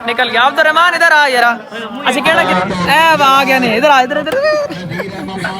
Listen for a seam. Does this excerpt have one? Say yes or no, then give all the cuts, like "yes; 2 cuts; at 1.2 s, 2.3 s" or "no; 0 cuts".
yes; 1 cut; at 2.5 s